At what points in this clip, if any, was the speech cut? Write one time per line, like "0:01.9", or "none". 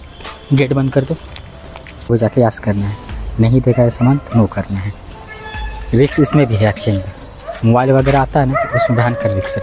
0:02.1